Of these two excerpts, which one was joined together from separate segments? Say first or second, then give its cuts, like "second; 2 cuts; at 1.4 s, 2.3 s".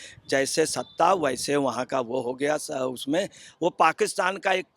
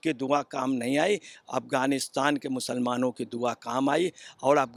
first; 1 cut; at 3.4 s